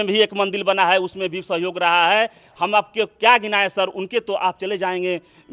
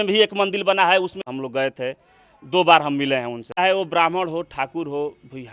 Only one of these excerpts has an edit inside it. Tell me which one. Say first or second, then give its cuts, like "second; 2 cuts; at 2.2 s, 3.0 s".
second; 2 cuts; at 1.2 s, 3.6 s